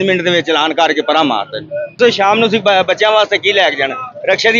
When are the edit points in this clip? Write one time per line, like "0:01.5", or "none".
0:02.0